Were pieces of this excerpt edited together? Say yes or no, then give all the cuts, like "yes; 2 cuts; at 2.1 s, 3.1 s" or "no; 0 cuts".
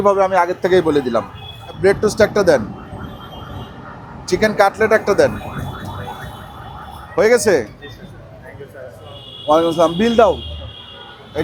no; 0 cuts